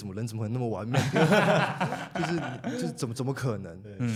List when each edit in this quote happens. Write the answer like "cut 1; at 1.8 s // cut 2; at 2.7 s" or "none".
none